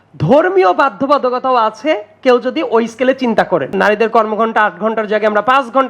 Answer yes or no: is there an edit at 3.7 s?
yes